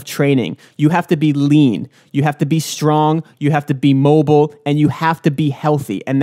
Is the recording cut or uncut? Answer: uncut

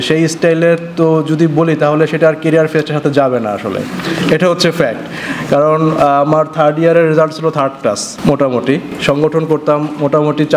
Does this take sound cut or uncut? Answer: uncut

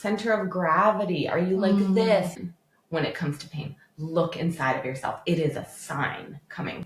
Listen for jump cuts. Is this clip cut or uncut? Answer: cut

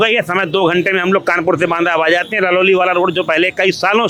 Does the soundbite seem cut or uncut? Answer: uncut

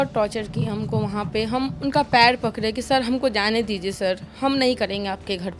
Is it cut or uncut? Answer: uncut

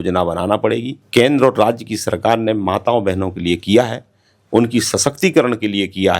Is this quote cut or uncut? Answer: cut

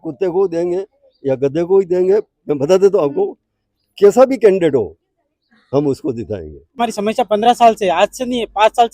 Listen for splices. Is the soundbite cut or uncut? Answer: cut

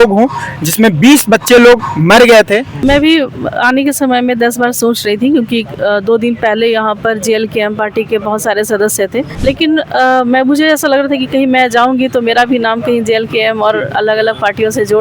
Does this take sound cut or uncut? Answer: cut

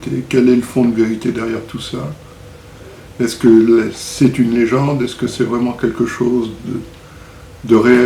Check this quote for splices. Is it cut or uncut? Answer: uncut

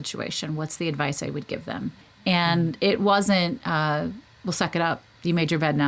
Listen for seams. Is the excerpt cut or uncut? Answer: cut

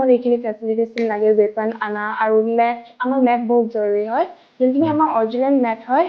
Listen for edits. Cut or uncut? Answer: uncut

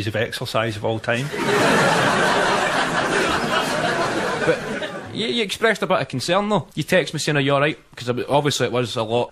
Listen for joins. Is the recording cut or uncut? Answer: cut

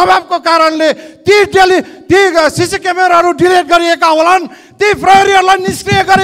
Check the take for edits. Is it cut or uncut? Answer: uncut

